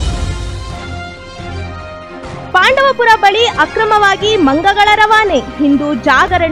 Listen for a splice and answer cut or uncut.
uncut